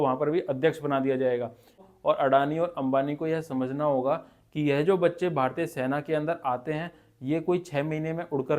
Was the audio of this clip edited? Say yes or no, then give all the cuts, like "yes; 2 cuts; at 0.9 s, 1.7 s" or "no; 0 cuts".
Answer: yes; 1 cut; at 1.8 s